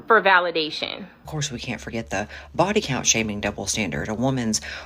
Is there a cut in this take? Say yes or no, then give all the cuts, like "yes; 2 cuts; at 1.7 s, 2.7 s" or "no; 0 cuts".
yes; 1 cut; at 1.3 s